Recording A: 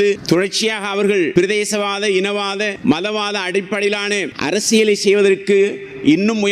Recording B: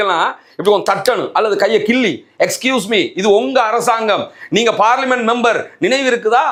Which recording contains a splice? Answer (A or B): A